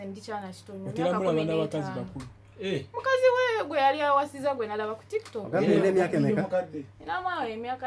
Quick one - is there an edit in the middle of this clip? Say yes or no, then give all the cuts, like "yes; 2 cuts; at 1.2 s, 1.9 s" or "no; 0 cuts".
no; 0 cuts